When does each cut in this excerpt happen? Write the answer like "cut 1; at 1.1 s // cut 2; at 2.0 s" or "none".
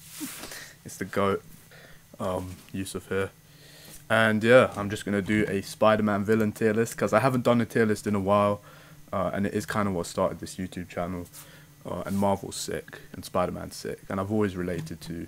cut 1; at 1.6 s